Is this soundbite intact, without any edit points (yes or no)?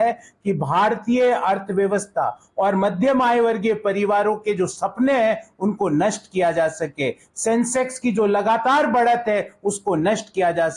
yes